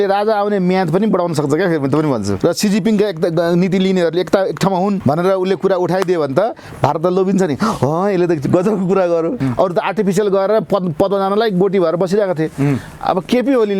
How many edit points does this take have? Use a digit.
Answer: 2